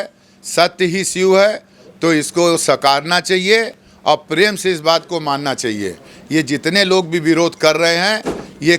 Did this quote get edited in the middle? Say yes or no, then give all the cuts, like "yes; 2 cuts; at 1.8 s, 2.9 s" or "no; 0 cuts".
no; 0 cuts